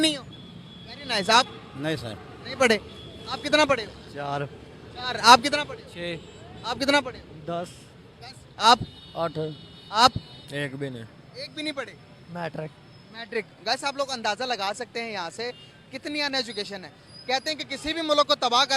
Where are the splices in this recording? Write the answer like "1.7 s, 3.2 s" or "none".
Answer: none